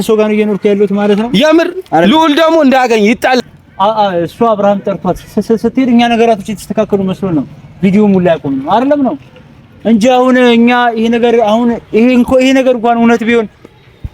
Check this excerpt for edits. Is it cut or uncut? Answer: cut